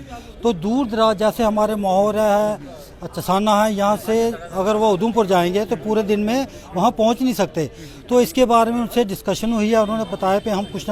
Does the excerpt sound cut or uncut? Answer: uncut